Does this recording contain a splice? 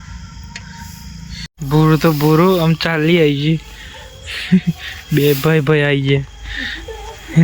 yes; 1 cut; at 1.5 s

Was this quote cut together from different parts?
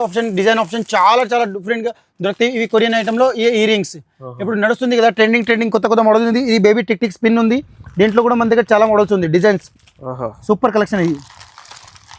no; 0 cuts

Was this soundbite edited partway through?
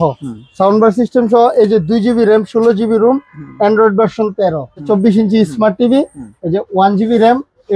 yes; 1 cut; at 4.9 s

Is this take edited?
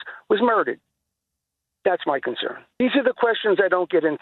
yes; 1 cut; at 2.8 s

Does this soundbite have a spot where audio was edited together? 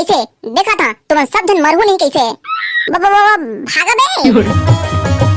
yes; 1 cut; at 4.5 s

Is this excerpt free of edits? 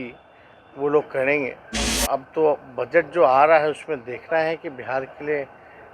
no; 1 cut; at 1.9 s

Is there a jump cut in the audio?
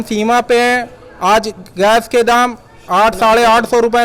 no; 0 cuts

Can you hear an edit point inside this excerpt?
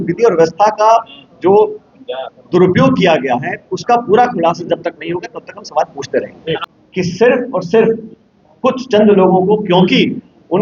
yes; 1 cut; at 6.6 s

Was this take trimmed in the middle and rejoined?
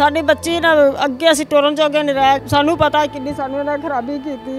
yes; 1 cut; at 2.4 s

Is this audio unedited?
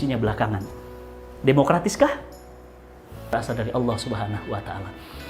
no; 1 cut; at 3.3 s

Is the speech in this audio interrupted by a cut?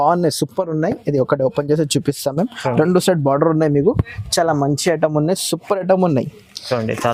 no; 0 cuts

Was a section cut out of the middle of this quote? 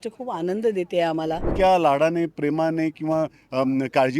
yes; 1 cut; at 1.5 s

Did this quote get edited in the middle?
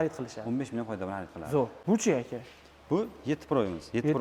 no; 0 cuts

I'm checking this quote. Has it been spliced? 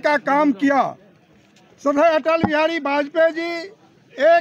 no; 0 cuts

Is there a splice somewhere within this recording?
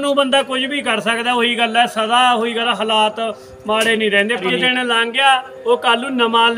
yes; 1 cut; at 4.4 s

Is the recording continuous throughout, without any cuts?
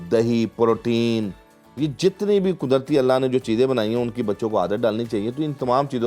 yes; 0 cuts

